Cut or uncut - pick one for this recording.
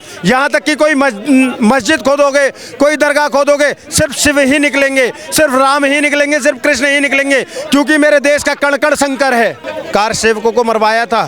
cut